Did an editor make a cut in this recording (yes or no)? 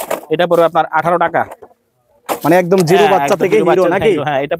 no